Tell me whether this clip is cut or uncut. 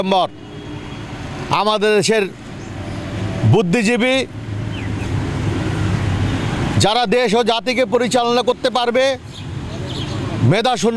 uncut